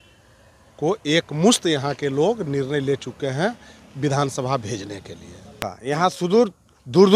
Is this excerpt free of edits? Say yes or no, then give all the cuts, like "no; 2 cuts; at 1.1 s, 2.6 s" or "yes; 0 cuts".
no; 1 cut; at 5.7 s